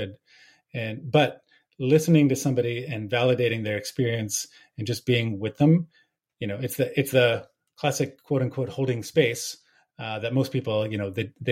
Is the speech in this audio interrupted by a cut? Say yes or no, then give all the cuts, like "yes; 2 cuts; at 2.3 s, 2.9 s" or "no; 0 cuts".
no; 0 cuts